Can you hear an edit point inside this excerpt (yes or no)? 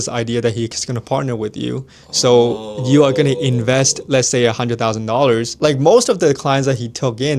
yes